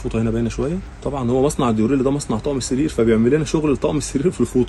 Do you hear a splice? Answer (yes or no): yes